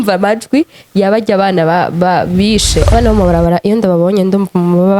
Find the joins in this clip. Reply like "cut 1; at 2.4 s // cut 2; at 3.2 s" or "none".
cut 1; at 2.9 s